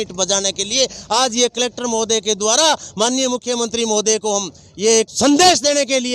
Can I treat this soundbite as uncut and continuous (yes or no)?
yes